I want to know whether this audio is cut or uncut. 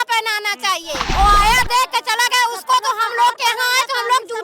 cut